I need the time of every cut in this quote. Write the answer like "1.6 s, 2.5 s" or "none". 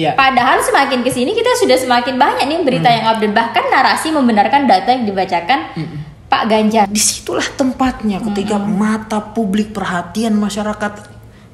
6.9 s